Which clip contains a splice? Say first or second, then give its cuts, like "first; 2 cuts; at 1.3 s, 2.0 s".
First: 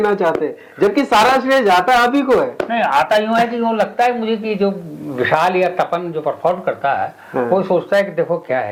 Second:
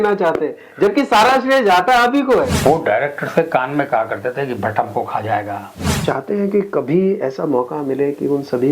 second; 2 cuts; at 2.5 s, 6.0 s